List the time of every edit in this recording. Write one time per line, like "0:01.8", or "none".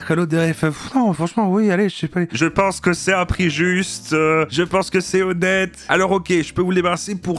0:02.3
0:05.8